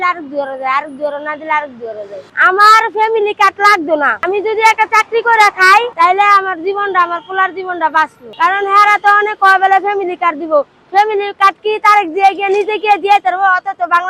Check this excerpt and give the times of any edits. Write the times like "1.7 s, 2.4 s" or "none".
2.3 s